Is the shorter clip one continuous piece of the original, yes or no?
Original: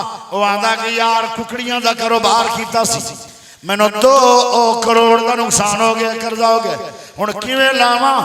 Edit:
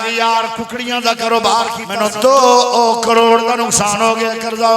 no